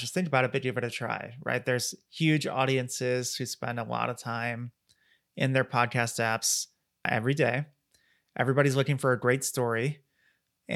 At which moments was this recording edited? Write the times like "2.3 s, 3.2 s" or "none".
7.0 s